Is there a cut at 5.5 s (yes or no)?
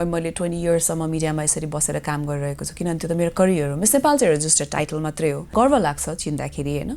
yes